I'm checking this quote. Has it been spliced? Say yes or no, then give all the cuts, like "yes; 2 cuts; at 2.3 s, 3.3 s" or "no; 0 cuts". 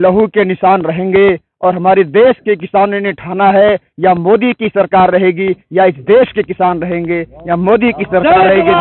no; 0 cuts